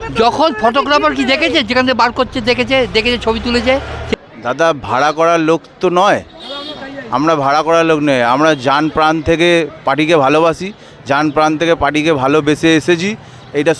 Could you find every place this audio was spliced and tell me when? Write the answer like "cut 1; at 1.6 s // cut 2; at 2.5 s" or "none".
cut 1; at 4.1 s